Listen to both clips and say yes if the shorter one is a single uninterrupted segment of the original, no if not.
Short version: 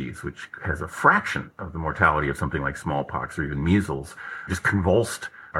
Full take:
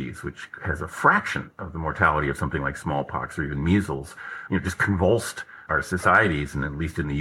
no